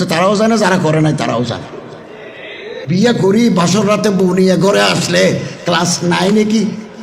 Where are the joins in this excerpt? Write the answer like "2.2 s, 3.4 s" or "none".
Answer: 2.8 s